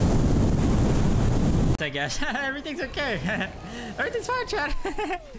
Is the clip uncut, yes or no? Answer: no